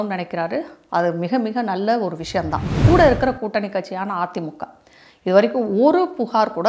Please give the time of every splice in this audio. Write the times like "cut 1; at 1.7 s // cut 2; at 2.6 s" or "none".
cut 1; at 2.8 s

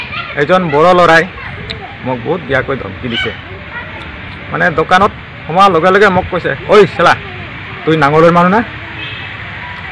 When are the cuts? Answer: cut 1; at 1.9 s

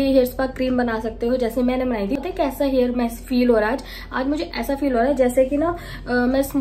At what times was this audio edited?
cut 1; at 2.2 s

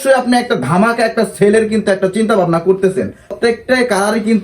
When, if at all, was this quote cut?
cut 1; at 3.4 s

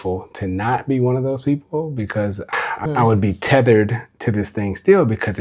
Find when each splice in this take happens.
cut 1; at 2.8 s

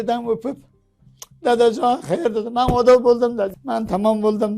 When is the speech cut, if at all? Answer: cut 1; at 3.6 s

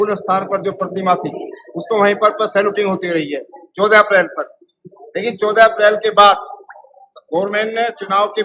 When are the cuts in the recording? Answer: none

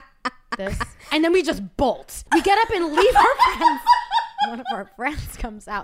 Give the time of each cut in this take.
cut 1; at 1.1 s // cut 2; at 2.1 s // cut 3; at 4.6 s

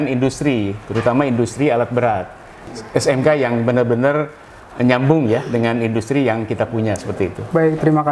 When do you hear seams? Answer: cut 1; at 2.7 s

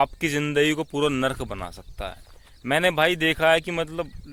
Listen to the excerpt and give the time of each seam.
none

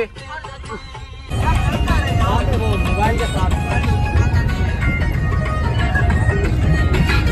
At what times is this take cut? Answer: none

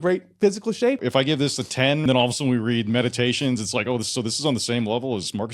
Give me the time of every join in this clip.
cut 1; at 1.0 s // cut 2; at 2.1 s

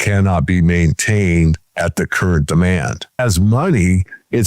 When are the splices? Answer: cut 1; at 3.2 s

